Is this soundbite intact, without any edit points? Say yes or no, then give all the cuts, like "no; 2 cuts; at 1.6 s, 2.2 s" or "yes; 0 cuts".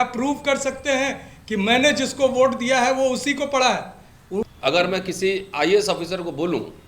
no; 1 cut; at 4.4 s